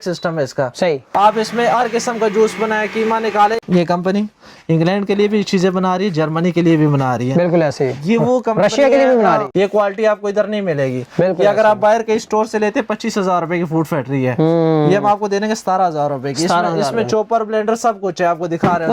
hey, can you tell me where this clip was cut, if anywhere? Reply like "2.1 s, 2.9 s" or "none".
none